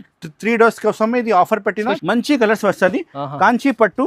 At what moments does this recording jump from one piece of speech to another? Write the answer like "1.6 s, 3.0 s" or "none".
2.0 s